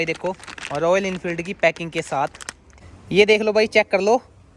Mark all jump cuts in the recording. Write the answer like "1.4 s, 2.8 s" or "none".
2.7 s